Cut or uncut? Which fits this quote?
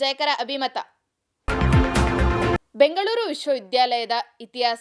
uncut